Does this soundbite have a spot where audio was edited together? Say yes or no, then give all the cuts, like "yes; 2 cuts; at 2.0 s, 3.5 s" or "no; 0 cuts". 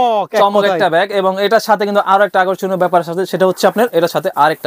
no; 0 cuts